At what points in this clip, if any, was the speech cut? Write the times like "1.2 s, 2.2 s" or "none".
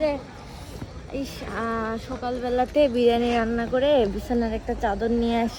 none